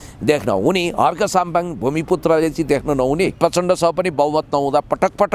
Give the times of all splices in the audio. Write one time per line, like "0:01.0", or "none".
0:03.3